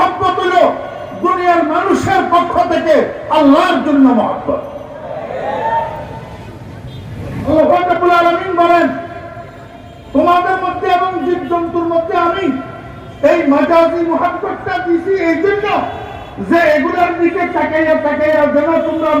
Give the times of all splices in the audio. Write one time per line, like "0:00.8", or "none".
0:07.5